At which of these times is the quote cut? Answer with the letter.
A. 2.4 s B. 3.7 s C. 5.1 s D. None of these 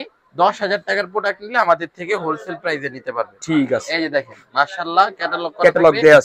D